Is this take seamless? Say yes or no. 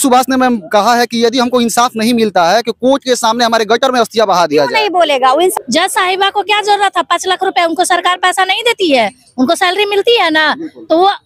no